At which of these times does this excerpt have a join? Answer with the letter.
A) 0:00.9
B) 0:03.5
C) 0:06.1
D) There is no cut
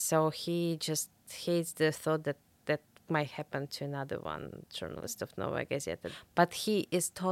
C